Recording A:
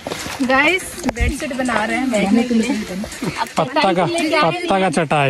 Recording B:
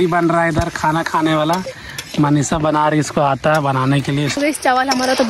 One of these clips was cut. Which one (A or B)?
B